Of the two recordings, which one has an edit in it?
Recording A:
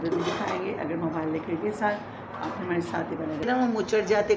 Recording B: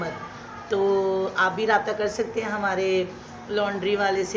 A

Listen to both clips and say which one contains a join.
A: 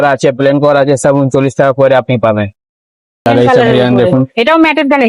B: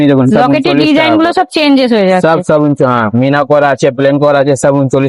A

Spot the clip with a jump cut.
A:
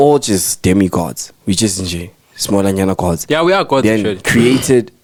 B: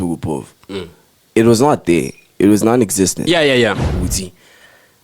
B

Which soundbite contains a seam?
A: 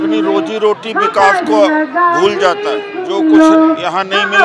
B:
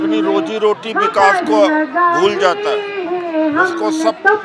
A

